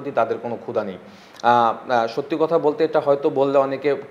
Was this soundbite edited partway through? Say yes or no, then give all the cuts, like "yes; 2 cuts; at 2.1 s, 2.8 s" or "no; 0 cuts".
no; 0 cuts